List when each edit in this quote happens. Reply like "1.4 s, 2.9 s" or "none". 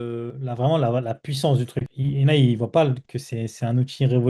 none